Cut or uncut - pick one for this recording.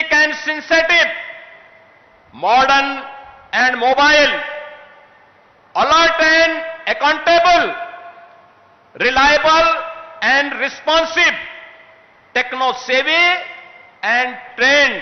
uncut